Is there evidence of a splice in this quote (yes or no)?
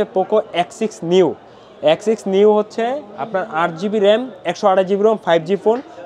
no